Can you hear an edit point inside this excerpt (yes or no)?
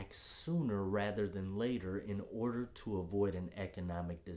no